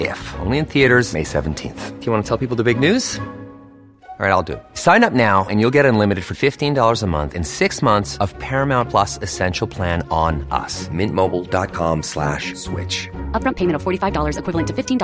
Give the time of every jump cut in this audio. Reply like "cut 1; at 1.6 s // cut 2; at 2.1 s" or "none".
none